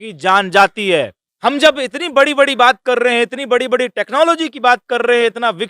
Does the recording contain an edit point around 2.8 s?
no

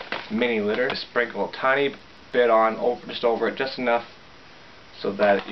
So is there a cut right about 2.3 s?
no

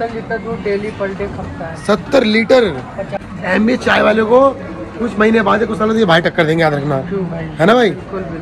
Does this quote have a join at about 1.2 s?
no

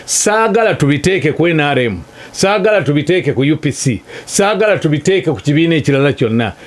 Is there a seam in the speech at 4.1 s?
no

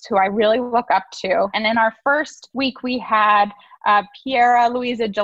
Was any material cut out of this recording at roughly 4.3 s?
no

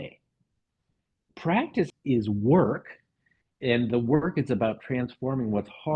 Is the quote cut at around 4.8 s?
no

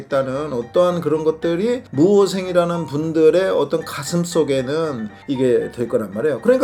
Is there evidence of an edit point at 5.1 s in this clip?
yes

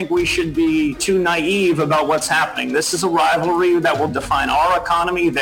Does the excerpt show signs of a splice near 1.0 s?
yes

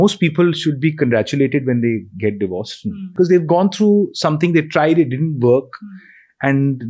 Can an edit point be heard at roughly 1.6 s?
no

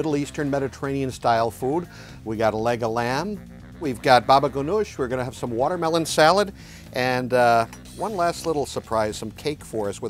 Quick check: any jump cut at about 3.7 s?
yes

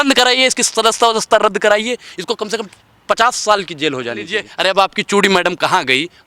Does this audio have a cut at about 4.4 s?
yes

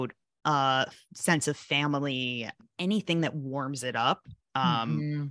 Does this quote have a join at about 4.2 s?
no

